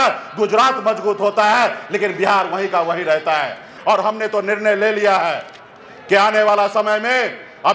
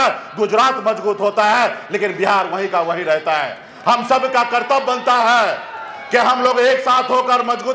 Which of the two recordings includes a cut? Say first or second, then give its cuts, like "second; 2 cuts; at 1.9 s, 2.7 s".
first; 1 cut; at 3.7 s